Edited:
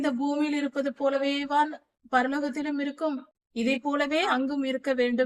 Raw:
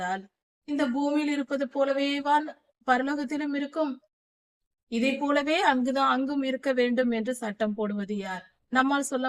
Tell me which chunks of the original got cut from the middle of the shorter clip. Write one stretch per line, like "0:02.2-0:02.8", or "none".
0:04.1-0:04.7
0:05.6-0:06.1